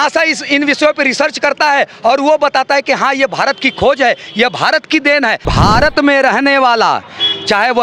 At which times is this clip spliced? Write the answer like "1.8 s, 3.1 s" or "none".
5.5 s